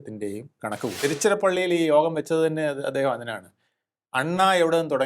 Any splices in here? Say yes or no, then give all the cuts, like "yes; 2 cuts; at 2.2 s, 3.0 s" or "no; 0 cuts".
yes; 1 cut; at 1.0 s